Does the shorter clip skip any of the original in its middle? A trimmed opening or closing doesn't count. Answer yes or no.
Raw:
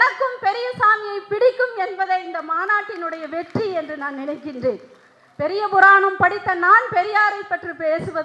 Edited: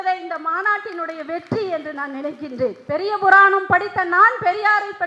yes